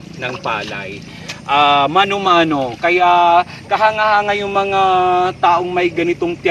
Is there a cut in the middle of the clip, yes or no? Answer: no